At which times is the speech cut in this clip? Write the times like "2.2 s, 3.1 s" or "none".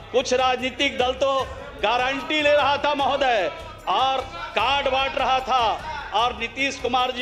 none

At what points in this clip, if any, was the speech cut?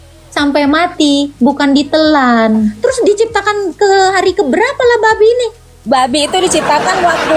2.8 s

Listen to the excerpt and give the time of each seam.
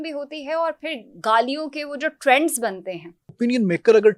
3.3 s

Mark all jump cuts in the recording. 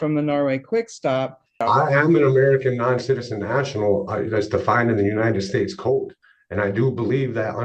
1.6 s

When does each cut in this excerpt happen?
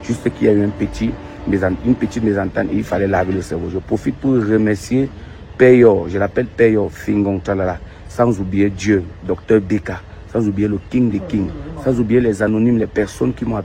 2.9 s

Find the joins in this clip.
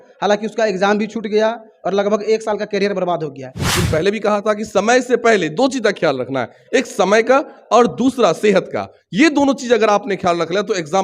3.6 s

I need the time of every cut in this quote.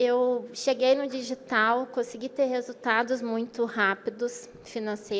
none

